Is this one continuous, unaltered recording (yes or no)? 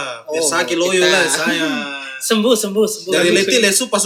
yes